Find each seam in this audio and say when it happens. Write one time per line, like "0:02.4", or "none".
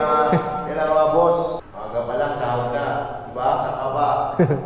0:01.6